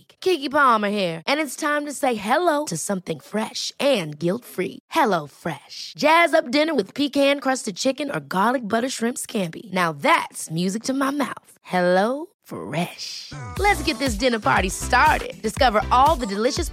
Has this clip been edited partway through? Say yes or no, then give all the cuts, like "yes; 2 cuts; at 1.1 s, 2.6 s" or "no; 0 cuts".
no; 0 cuts